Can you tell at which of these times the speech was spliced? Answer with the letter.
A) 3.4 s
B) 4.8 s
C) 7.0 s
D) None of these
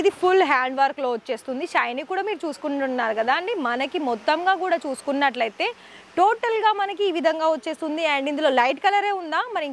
D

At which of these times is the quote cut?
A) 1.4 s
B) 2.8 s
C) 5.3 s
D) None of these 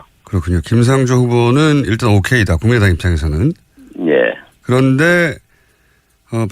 A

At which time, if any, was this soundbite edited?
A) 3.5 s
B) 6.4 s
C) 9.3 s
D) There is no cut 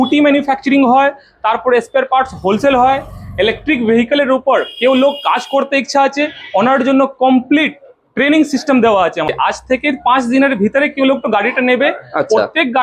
C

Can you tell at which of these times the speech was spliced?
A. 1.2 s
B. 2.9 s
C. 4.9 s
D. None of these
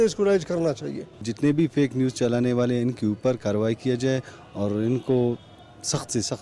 A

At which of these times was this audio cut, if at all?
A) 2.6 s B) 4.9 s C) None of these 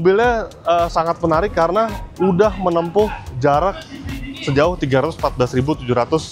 C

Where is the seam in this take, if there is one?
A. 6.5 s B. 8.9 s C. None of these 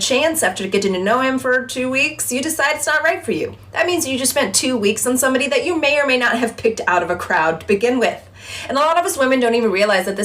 B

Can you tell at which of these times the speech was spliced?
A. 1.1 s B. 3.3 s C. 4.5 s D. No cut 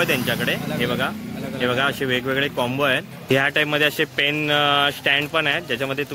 B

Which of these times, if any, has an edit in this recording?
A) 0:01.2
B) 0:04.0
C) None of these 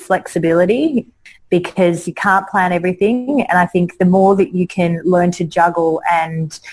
A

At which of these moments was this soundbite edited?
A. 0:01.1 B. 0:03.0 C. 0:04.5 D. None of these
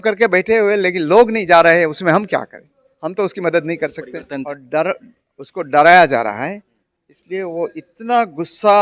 C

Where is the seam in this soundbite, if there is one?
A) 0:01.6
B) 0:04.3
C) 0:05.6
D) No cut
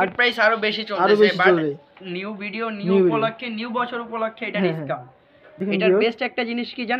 C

